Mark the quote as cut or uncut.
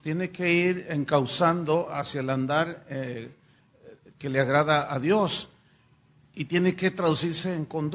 uncut